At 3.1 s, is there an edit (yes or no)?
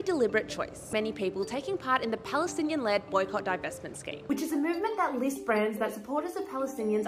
no